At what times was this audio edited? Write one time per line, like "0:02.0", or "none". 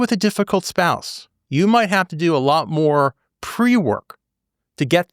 0:01.4